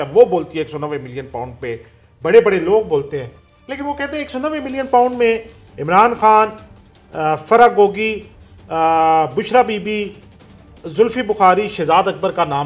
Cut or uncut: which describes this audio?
uncut